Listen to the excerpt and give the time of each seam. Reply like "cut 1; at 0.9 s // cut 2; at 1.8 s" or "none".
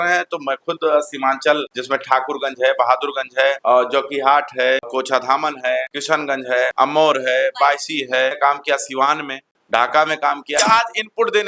cut 1; at 8.4 s // cut 2; at 9.5 s // cut 3; at 10.6 s